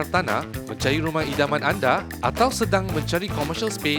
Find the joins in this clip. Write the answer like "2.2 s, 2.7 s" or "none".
none